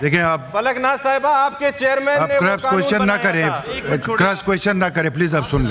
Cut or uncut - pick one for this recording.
uncut